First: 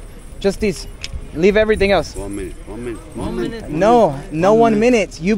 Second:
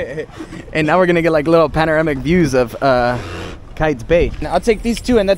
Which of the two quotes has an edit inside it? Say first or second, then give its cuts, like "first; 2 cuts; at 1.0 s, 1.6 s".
second; 1 cut; at 4.4 s